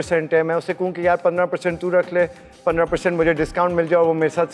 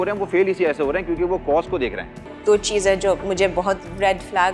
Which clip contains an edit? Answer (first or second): second